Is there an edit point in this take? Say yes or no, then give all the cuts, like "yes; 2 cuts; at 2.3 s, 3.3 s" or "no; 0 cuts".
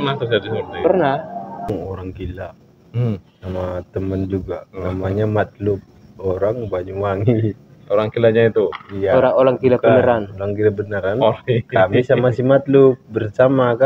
yes; 1 cut; at 1.8 s